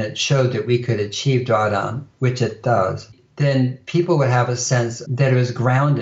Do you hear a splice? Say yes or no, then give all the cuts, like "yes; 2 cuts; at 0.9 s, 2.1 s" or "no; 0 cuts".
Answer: yes; 2 cuts; at 3.1 s, 5.0 s